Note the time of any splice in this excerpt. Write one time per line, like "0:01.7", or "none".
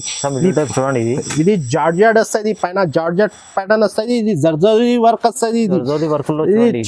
none